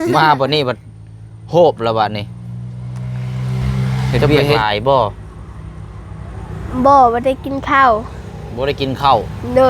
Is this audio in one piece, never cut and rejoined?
no; 1 cut; at 4.3 s

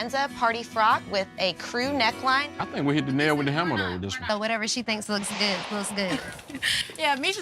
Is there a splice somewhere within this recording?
yes; 1 cut; at 4.2 s

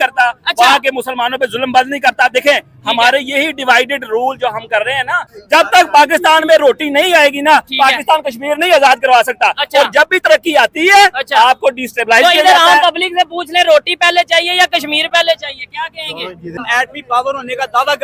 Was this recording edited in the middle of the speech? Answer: yes; 2 cuts; at 5.3 s, 16.6 s

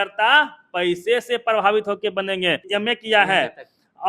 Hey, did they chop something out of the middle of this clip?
yes; 1 cut; at 2.7 s

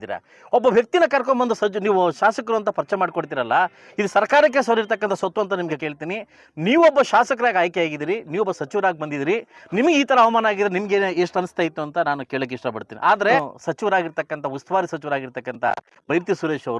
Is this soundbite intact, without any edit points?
no; 2 cuts; at 5.8 s, 13.4 s

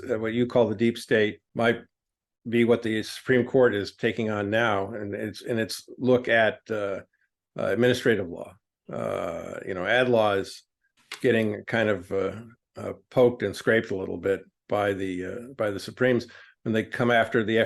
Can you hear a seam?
yes; 1 cut; at 1.4 s

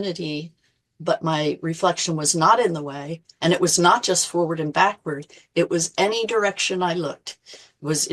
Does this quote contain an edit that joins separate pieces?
no; 0 cuts

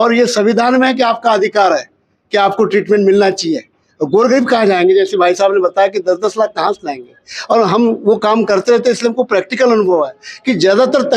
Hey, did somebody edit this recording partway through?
no; 0 cuts

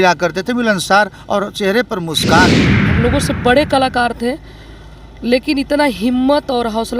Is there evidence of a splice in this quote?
yes; 1 cut; at 2.8 s

